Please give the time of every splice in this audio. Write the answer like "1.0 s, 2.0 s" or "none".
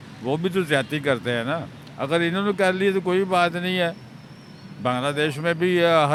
none